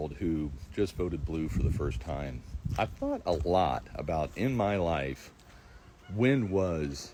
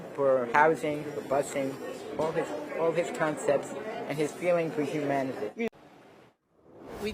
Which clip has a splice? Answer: second; 1 cut; at 5.7 s

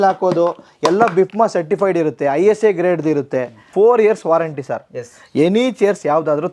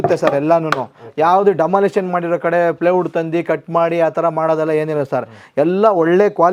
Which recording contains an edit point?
first; 1 cut; at 3.7 s

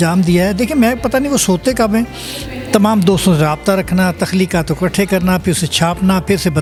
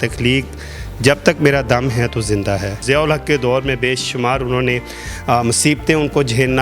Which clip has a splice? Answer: second; 1 cut; at 2.8 s

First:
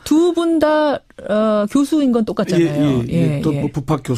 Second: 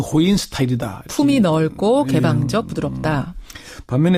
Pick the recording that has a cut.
second; 1 cut; at 3.1 s

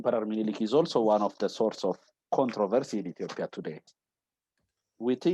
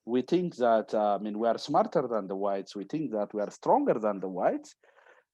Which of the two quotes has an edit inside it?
first; 1 cut; at 3.8 s

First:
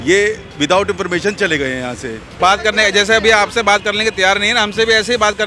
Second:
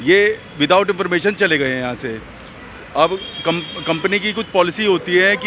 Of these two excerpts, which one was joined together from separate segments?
first; 1 cut; at 2.3 s

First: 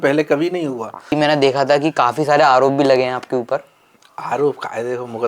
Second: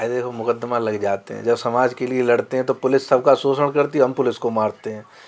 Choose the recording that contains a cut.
first; 1 cut; at 1.1 s

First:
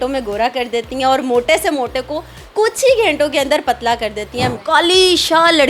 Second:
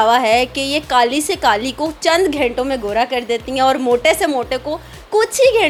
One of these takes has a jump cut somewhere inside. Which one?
first; 1 cut; at 4.6 s

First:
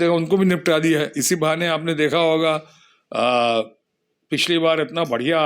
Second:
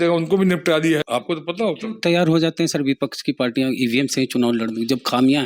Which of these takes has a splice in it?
second; 1 cut; at 1.0 s

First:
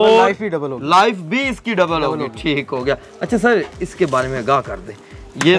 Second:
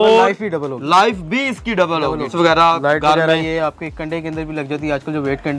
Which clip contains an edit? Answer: second; 1 cut; at 2.3 s

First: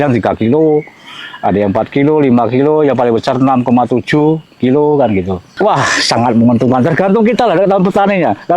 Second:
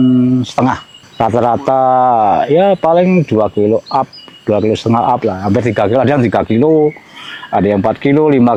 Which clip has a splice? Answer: first; 1 cut; at 5.5 s

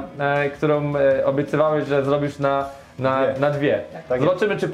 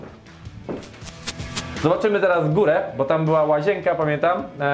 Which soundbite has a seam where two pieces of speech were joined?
second; 1 cut; at 1.5 s

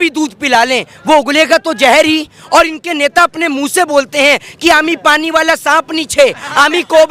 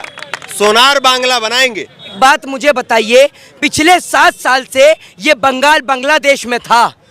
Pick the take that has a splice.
second; 1 cut; at 2.1 s

